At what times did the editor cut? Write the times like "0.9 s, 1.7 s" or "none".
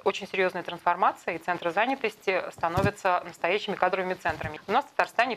4.5 s